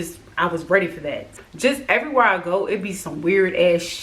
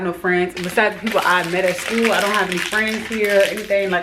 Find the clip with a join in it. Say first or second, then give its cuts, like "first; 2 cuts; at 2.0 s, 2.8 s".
first; 1 cut; at 1.3 s